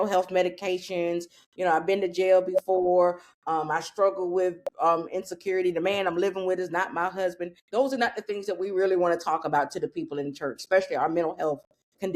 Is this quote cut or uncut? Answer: cut